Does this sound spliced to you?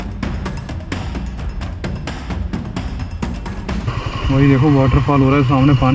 yes; 1 cut; at 3.9 s

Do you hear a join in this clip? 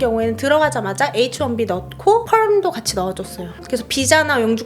yes; 1 cut; at 3.6 s

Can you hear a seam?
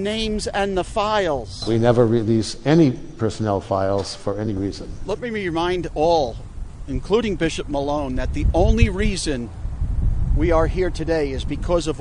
yes; 2 cuts; at 1.5 s, 4.9 s

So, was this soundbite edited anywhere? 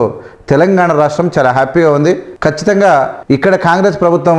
yes; 2 cuts; at 2.3 s, 3.2 s

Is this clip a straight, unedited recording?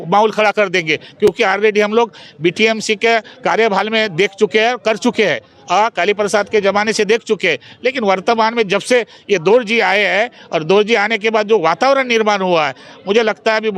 yes; 0 cuts

